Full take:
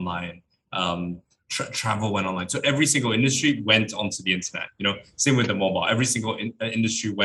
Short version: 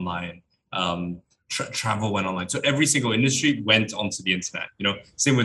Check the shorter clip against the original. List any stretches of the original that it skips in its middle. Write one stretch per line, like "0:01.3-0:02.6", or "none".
none